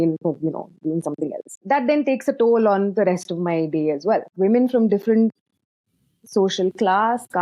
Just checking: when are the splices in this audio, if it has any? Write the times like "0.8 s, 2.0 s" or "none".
1.6 s, 4.3 s